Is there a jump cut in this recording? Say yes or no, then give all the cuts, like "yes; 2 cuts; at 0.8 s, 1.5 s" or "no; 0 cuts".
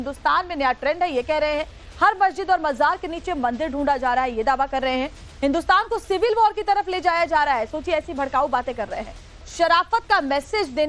yes; 1 cut; at 9.7 s